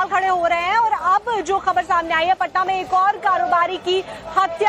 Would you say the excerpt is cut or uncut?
cut